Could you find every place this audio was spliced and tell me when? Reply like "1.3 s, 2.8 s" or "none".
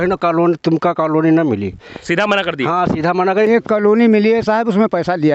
3.5 s